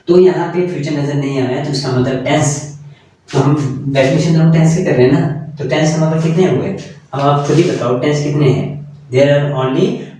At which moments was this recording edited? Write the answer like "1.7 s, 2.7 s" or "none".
none